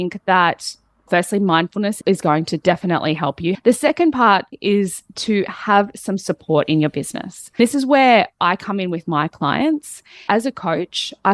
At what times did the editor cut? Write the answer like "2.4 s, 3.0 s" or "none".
3.6 s, 4.5 s, 7.6 s, 10.2 s